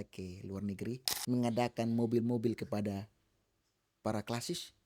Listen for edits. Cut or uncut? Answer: cut